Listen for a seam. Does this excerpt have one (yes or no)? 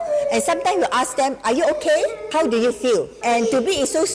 yes